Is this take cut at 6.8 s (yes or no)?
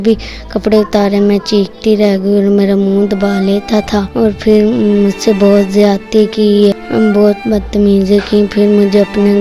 yes